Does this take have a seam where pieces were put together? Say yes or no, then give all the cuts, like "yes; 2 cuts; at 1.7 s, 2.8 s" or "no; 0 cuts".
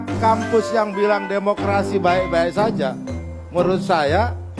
no; 0 cuts